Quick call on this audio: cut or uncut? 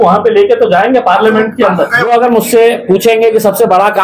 cut